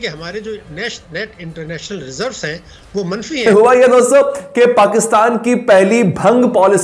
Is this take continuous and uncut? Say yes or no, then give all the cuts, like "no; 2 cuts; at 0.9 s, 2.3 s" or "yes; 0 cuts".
no; 1 cut; at 3.5 s